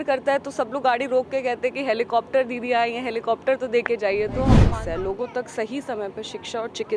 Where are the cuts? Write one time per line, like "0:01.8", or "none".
0:04.6

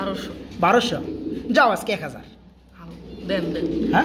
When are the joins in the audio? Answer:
none

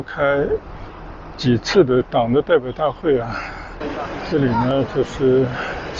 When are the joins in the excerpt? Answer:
0:03.8

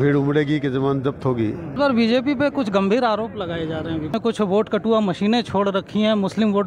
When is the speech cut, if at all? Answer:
0:01.7
0:04.1

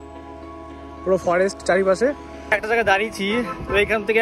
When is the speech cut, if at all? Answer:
0:02.3

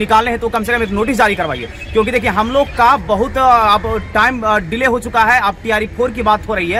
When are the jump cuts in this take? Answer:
none

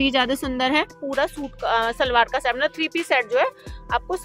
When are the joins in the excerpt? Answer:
0:01.0

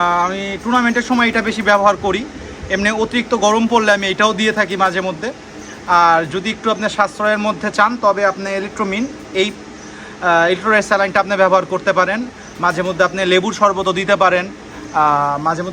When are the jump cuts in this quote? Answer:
none

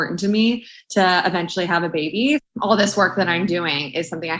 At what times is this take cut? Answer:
0:02.4

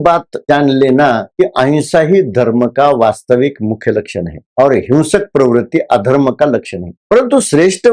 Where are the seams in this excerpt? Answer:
0:01.3

